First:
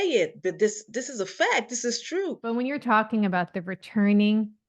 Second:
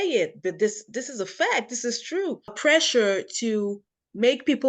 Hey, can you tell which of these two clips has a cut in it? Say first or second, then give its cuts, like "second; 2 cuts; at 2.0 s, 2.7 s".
second; 1 cut; at 2.5 s